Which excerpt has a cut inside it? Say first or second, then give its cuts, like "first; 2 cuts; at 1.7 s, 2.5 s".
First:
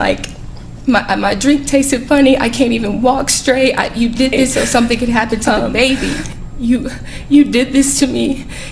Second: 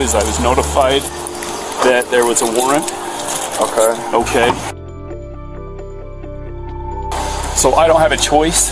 first; 1 cut; at 6.3 s